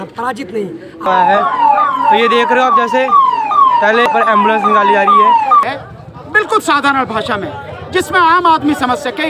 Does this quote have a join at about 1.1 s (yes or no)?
yes